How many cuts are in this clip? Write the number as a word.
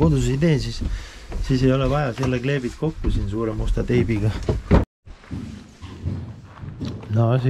one